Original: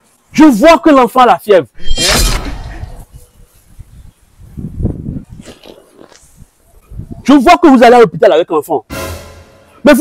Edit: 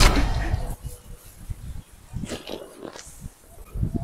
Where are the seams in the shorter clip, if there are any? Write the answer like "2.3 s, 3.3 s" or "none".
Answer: 2.1 s